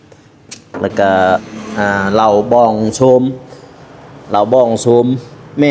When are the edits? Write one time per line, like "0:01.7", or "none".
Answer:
0:01.6